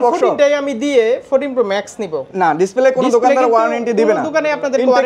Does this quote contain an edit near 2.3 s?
yes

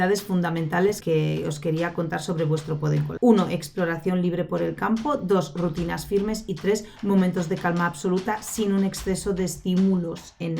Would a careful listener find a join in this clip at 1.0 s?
yes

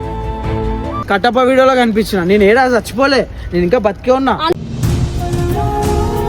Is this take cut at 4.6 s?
no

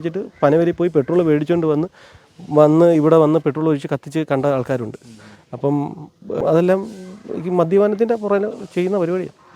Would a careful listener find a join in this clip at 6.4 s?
yes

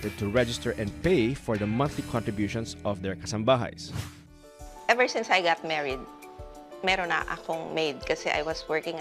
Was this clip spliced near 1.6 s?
no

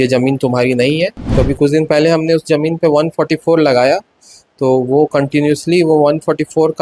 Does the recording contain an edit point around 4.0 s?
no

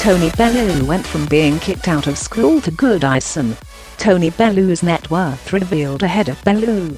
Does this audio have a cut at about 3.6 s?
no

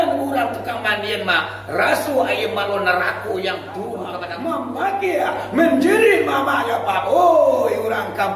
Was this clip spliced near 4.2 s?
yes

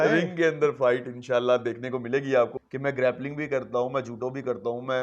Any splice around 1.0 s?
no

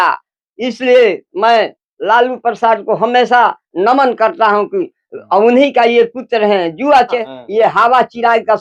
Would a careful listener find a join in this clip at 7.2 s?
yes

